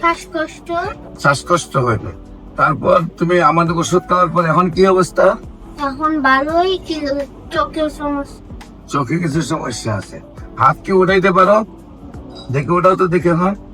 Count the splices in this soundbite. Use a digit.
1